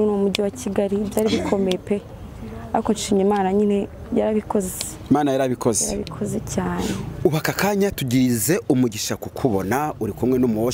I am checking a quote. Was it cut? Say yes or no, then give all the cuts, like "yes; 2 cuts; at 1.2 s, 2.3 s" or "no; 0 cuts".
no; 0 cuts